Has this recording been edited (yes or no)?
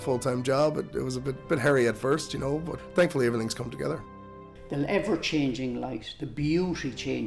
yes